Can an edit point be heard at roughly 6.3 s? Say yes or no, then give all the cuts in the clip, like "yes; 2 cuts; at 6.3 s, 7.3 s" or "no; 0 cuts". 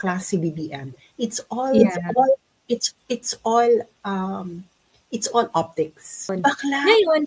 yes; 1 cut; at 6.3 s